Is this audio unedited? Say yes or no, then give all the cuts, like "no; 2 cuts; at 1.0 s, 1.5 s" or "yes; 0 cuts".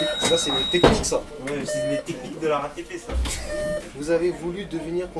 no; 1 cut; at 3.3 s